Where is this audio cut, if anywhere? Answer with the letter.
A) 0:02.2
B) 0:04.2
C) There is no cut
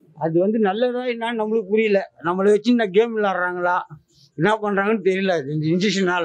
C